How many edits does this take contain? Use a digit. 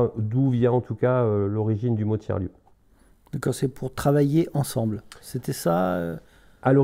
0